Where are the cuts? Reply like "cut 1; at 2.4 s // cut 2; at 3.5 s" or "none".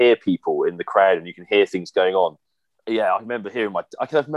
none

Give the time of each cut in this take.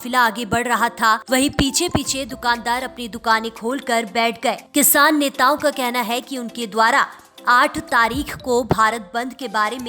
cut 1; at 1.2 s // cut 2; at 4.6 s

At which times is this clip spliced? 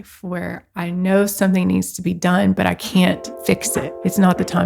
cut 1; at 3.6 s

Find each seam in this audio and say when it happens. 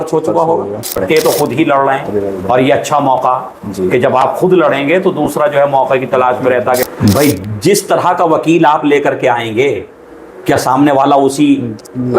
cut 1; at 0.9 s // cut 2; at 6.8 s

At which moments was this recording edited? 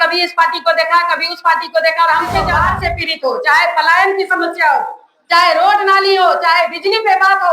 cut 1; at 2.5 s

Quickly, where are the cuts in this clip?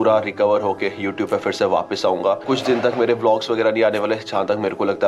none

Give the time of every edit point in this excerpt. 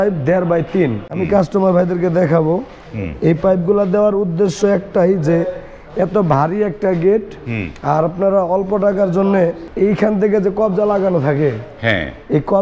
cut 1; at 1.2 s // cut 2; at 2.8 s // cut 3; at 9.6 s

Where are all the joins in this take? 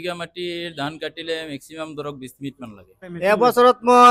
cut 1; at 3.1 s

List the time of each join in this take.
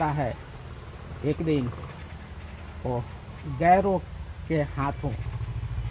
none

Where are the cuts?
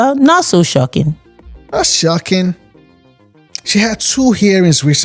cut 1; at 3.0 s

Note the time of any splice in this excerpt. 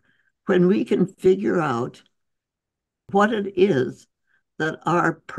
cut 1; at 3.1 s

